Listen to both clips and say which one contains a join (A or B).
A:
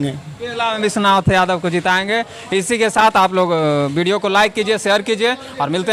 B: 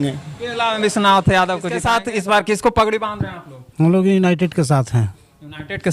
B